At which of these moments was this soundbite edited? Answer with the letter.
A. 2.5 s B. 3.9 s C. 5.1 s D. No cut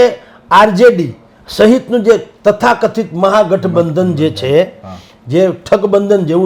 D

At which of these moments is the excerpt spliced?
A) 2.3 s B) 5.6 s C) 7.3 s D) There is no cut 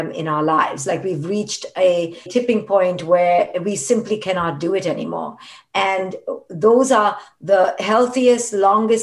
A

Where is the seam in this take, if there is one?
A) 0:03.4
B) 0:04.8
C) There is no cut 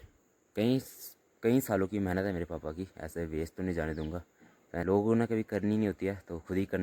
B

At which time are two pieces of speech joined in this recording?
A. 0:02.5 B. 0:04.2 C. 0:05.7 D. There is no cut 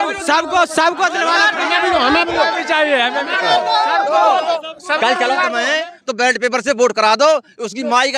C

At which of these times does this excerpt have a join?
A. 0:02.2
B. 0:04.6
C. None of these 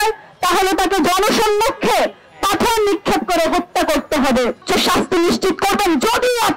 B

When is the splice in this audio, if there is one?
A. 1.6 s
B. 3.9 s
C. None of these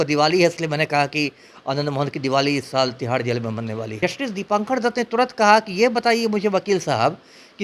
B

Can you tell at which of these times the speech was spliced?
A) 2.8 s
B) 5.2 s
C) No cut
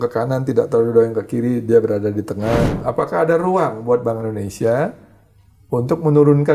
A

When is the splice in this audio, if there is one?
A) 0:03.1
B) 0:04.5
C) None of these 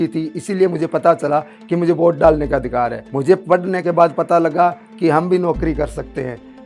A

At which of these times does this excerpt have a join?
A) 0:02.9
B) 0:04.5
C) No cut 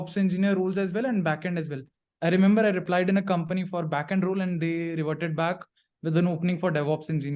A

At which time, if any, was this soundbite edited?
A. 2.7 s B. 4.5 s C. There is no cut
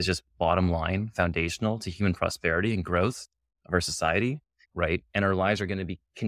B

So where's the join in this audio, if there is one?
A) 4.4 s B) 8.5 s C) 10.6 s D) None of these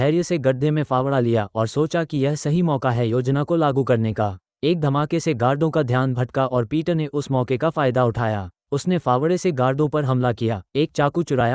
D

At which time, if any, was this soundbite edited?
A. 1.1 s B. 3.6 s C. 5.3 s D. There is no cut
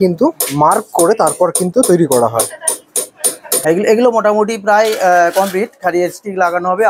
B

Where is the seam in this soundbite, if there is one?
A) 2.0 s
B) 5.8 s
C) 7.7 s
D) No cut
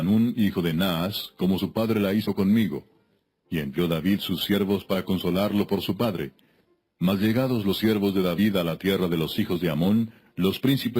A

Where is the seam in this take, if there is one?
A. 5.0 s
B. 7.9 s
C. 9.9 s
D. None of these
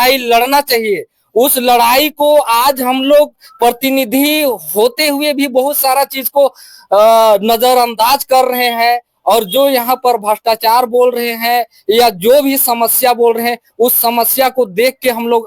D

